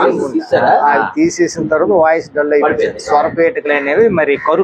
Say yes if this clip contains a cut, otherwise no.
no